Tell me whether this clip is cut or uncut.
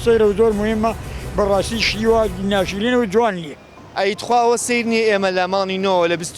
cut